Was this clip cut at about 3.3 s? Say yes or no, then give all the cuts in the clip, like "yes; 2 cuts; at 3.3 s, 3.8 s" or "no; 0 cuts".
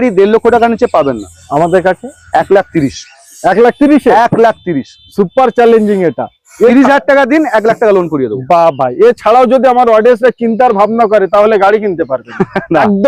no; 0 cuts